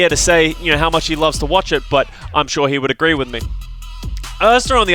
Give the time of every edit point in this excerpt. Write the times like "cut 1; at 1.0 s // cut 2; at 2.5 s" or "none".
none